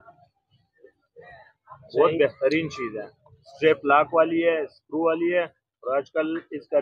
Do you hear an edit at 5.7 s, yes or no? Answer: no